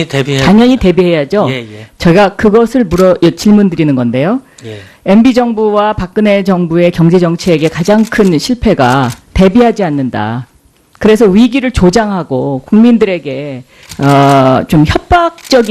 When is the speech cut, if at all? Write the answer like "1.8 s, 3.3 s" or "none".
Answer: 6.1 s

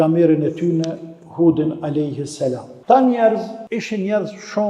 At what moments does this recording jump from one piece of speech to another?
2.7 s, 3.6 s

